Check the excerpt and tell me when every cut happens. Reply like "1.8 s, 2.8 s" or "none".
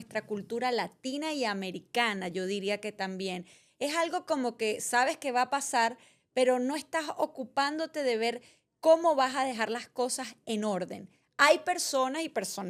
none